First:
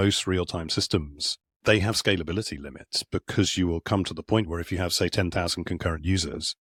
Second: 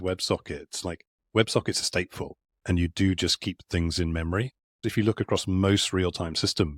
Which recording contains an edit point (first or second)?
second